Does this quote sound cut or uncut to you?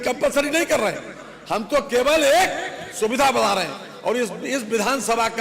uncut